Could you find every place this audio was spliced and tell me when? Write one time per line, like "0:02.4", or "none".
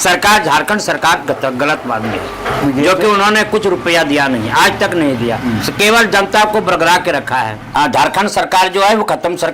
0:07.6